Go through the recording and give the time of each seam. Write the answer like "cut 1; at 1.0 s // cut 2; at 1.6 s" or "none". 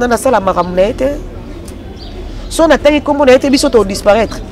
none